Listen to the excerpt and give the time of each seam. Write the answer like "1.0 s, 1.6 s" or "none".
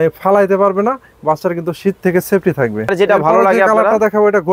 2.9 s

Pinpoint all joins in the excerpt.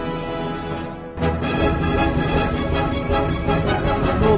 1.2 s

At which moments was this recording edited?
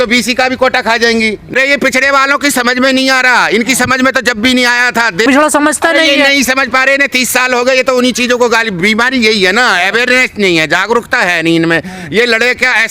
1.5 s, 5.2 s

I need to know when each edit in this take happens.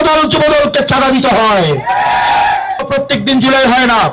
2.9 s

